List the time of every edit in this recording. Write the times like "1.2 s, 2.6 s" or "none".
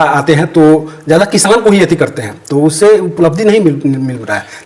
none